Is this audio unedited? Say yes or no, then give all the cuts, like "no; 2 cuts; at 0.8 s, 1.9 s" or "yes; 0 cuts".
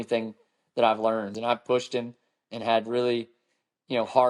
no; 1 cut; at 1.3 s